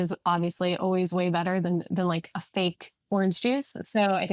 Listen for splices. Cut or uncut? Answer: uncut